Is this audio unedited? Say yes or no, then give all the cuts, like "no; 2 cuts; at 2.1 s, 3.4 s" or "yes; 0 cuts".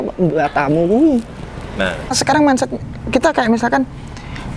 no; 1 cut; at 2.2 s